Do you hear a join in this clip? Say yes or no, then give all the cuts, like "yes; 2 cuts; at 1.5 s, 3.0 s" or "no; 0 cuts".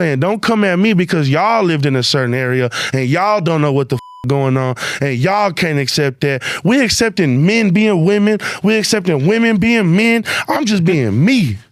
no; 0 cuts